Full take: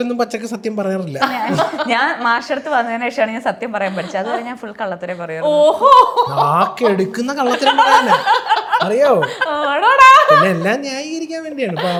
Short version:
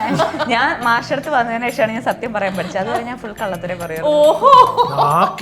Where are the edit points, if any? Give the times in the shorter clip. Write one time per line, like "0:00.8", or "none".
none